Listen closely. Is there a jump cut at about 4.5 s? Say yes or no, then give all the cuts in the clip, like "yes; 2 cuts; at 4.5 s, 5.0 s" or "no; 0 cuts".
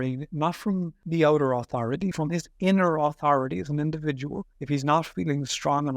yes; 3 cuts; at 1.0 s, 2.1 s, 4.5 s